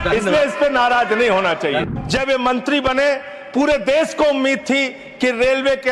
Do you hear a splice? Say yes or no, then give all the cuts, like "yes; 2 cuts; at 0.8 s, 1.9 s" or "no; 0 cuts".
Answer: yes; 1 cut; at 1.8 s